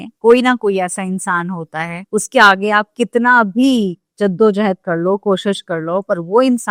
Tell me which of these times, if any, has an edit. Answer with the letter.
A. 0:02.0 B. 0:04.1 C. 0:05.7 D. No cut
D